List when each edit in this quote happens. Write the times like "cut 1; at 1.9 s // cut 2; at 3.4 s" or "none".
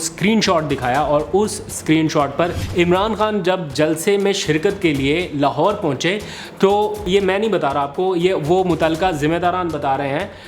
cut 1; at 2.6 s // cut 2; at 7.0 s